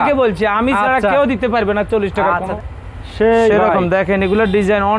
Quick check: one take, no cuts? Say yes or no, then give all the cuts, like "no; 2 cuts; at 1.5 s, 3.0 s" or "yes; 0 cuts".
no; 1 cut; at 2.5 s